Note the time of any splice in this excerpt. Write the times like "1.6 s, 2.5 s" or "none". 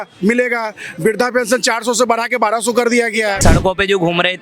3.4 s